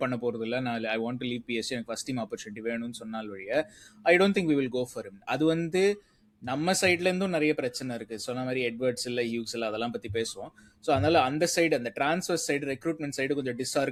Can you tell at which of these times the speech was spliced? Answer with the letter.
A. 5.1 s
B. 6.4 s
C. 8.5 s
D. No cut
D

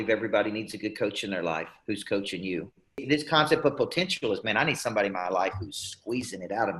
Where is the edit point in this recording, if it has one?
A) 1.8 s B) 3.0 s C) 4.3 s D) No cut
B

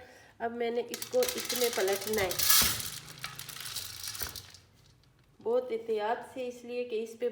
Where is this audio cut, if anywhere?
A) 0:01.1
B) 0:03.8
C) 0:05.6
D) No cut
D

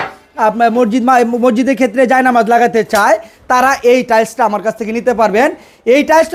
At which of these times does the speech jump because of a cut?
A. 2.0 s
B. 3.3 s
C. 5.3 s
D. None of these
D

